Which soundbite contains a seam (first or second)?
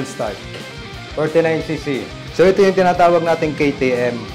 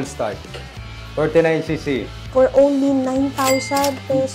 first